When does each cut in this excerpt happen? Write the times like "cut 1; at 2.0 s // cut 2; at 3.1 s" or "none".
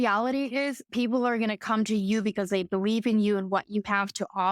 cut 1; at 0.9 s